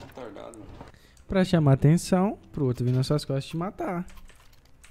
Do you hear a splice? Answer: no; 0 cuts

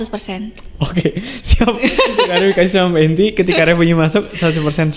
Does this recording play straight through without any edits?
yes; 0 cuts

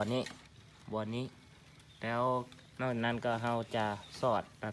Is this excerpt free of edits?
yes; 0 cuts

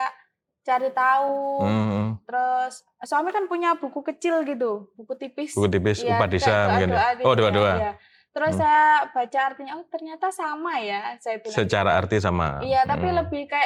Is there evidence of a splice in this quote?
no; 0 cuts

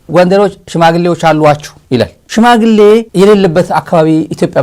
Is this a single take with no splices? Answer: no; 2 cuts; at 2.0 s, 3.1 s

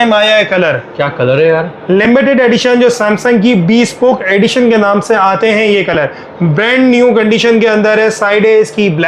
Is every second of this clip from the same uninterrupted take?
yes; 0 cuts

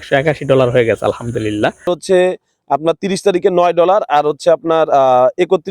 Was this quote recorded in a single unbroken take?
no; 1 cut; at 2.0 s

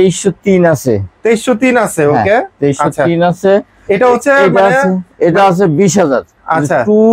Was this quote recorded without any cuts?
yes; 0 cuts

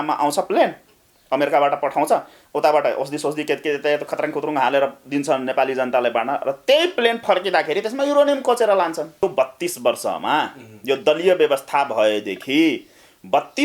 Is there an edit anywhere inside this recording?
yes; 1 cut; at 9.2 s

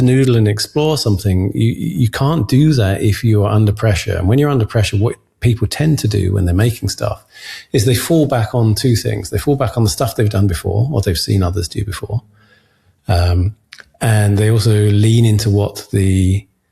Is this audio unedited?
yes; 0 cuts

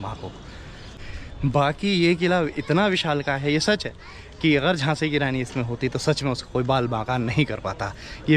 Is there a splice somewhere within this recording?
yes; 1 cut; at 1.0 s

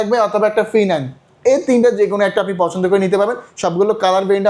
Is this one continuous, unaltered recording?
yes; 0 cuts

